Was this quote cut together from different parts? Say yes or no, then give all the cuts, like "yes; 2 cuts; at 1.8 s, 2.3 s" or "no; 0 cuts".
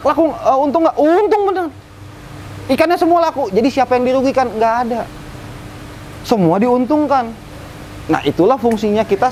no; 0 cuts